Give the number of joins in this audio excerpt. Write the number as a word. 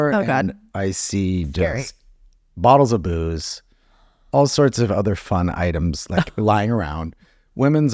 zero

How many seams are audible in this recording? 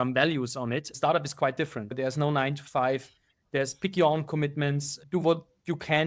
three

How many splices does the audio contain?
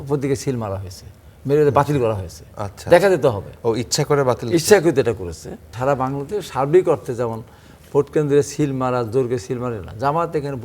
one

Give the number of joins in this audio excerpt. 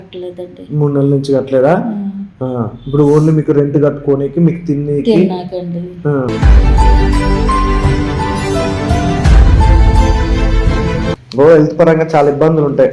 one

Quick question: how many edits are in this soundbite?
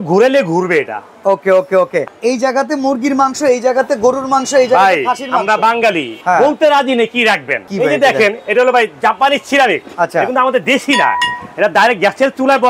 four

